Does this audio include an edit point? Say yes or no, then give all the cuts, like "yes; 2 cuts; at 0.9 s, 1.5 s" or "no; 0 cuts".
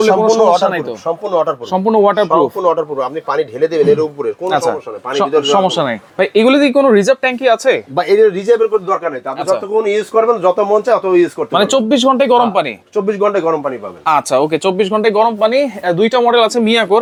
no; 0 cuts